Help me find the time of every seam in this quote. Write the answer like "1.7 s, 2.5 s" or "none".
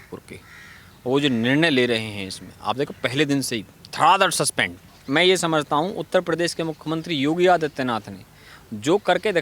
4.9 s